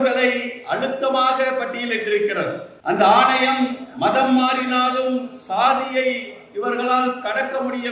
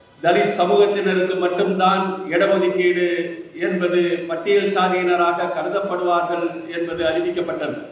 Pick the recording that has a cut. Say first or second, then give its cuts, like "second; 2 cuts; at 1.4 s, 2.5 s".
first; 1 cut; at 2.7 s